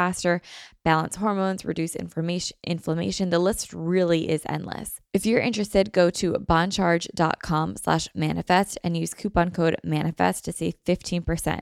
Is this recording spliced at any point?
yes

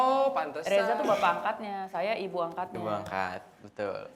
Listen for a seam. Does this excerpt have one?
no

